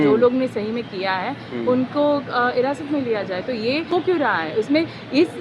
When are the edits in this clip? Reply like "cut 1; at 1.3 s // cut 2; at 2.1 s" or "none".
cut 1; at 3.9 s